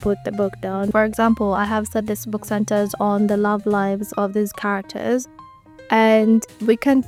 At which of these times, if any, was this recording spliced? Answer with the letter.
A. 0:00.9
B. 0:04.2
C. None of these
C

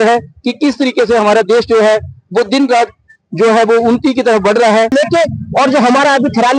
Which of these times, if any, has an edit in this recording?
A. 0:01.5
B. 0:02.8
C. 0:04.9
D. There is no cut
C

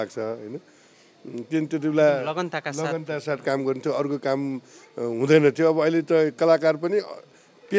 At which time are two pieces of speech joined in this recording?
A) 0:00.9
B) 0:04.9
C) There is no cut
C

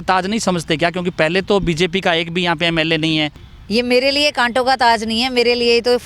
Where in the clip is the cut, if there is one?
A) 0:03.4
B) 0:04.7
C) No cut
A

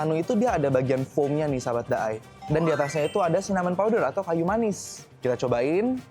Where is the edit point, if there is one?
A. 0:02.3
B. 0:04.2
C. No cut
A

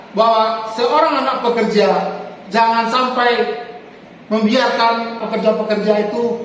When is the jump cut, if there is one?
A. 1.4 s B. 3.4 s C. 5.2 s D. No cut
C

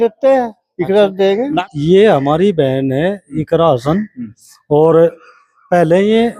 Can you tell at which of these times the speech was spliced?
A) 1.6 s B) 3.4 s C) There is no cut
A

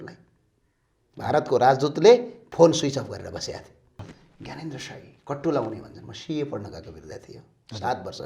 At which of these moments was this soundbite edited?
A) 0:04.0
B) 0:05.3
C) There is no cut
A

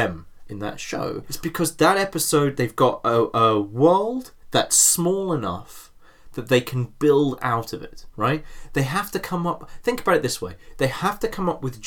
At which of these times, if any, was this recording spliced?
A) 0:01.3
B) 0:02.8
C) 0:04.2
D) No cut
A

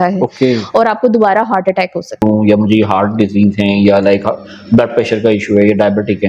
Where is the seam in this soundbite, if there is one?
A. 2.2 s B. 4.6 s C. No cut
A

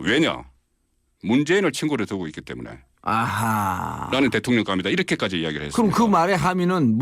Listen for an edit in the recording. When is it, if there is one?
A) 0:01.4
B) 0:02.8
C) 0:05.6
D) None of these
B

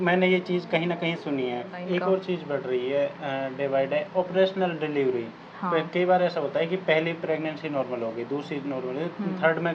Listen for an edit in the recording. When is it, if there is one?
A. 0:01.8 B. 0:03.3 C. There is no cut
A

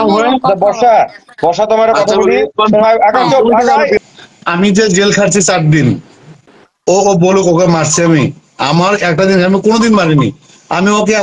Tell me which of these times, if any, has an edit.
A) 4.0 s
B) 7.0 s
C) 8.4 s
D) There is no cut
A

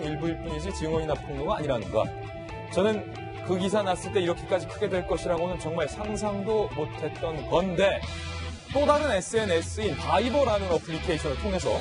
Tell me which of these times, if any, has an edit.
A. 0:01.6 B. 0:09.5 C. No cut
B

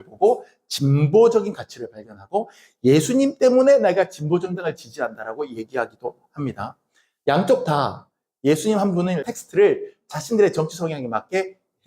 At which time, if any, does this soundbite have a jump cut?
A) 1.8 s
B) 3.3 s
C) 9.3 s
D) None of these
C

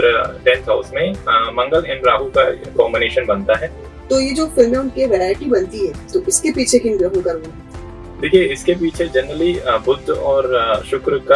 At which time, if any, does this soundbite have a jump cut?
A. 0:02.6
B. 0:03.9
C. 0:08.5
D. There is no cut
B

